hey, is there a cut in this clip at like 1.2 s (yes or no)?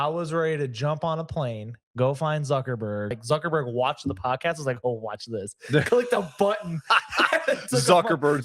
no